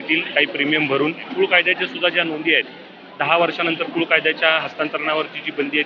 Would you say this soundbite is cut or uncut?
cut